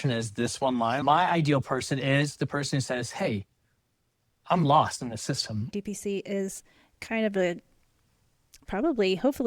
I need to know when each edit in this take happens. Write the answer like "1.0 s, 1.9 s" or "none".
1.0 s, 5.7 s